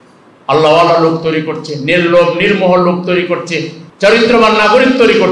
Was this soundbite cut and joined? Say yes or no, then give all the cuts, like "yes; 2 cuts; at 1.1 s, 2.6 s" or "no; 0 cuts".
yes; 1 cut; at 3.8 s